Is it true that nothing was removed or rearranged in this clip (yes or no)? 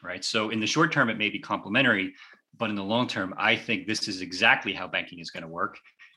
yes